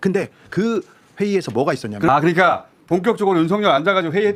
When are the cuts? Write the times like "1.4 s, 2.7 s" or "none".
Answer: none